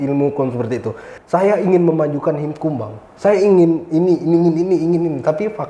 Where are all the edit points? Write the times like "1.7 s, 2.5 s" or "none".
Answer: 1.1 s